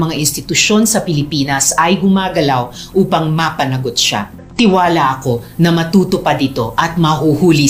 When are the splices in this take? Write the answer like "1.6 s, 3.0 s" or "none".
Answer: 4.4 s